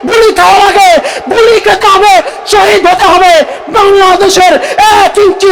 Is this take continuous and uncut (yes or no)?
yes